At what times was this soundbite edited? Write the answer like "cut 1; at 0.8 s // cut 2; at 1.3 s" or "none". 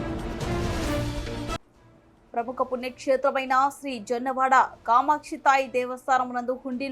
cut 1; at 1.1 s